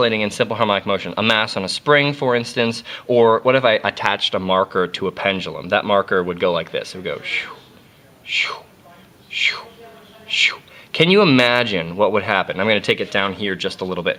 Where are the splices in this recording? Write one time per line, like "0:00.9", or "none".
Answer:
none

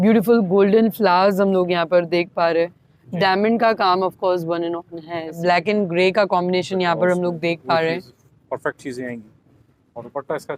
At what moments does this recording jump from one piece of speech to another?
0:05.4
0:08.2

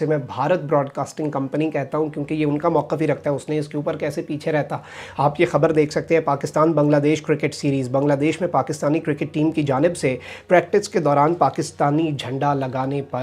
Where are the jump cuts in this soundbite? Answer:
none

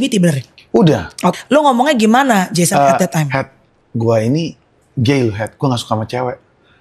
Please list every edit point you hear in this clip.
0:01.4

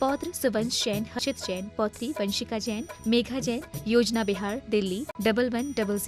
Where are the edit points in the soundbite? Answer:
0:01.2

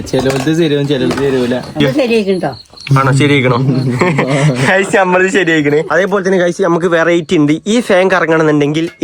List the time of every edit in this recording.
0:01.8
0:05.9

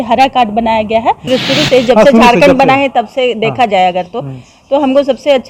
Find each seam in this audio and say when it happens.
0:01.3

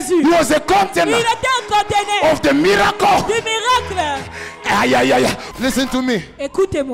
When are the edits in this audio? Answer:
0:05.5

